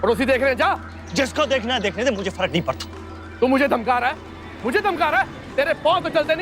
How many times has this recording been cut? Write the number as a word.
two